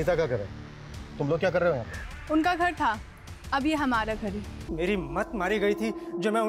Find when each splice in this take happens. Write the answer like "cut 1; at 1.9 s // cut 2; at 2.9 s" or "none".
cut 1; at 4.6 s